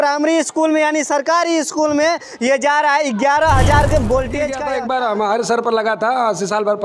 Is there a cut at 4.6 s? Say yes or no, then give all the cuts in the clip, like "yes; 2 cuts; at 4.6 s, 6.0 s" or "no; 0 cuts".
yes; 1 cut; at 4.6 s